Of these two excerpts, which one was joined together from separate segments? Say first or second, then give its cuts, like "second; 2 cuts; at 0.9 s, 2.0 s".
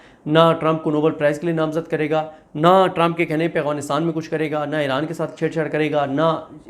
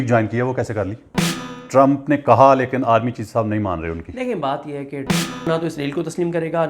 second; 2 cuts; at 1.5 s, 5.4 s